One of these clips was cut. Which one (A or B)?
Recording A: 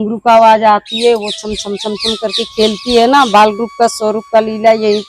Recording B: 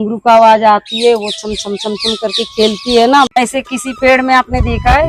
B